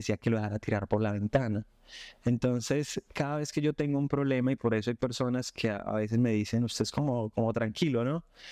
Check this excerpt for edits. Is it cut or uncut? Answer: uncut